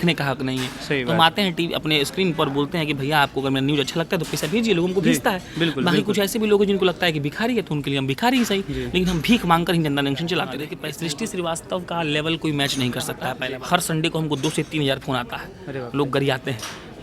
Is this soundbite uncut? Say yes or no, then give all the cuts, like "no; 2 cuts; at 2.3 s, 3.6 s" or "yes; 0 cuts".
no; 2 cuts; at 10.8 s, 13.4 s